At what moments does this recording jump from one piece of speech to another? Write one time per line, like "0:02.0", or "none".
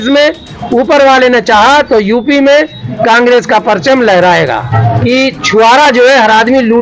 0:04.7